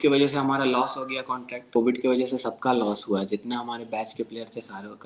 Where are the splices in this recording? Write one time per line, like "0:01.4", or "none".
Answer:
0:01.7